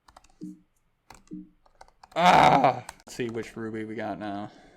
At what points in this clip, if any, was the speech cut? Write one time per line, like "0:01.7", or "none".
0:03.1